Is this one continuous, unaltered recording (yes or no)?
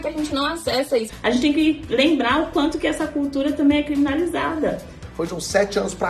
no